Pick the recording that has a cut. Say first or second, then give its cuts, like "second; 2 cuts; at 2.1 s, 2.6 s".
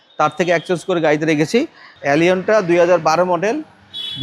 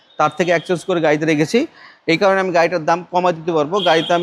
first; 1 cut; at 1.8 s